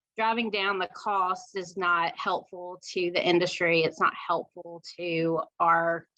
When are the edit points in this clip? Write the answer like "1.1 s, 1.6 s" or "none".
none